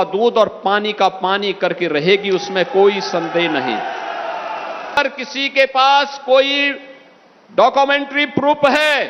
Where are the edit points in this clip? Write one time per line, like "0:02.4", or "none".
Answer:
0:05.0